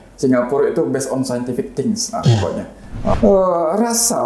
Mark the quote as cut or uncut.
cut